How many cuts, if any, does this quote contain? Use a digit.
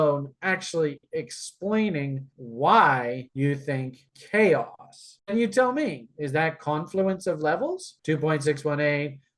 1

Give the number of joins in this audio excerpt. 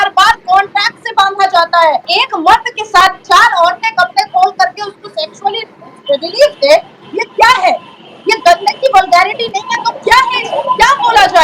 1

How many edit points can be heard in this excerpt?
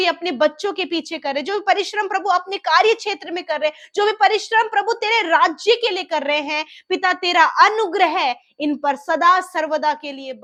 0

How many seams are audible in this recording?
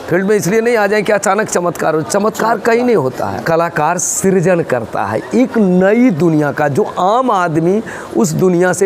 1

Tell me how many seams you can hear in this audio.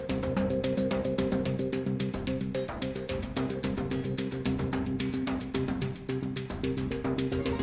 0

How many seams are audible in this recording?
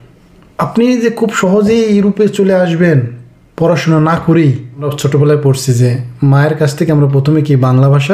1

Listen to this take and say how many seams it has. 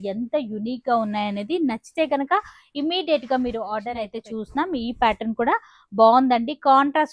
1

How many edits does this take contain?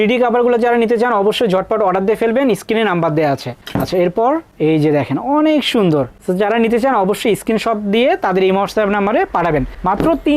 0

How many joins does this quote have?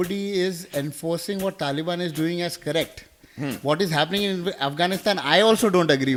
0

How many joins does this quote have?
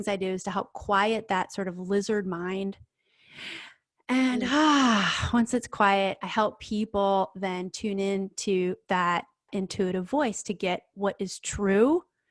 0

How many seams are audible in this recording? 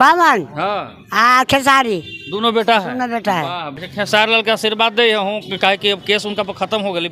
1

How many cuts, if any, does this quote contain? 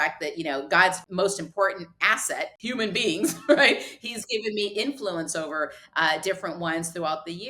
2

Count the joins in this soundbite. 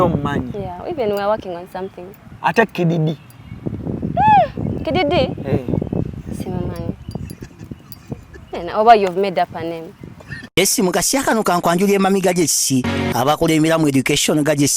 1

